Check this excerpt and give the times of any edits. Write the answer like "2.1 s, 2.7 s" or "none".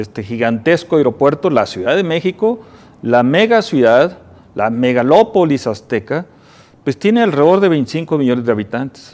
3.4 s